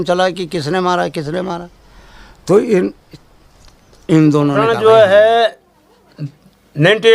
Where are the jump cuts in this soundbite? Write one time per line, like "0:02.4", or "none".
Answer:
0:04.6